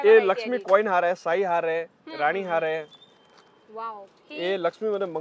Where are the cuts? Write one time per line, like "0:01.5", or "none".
none